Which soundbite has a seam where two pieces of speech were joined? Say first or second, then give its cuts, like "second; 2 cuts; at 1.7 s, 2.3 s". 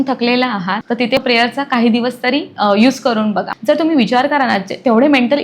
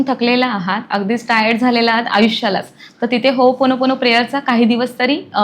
first; 2 cuts; at 1.2 s, 3.5 s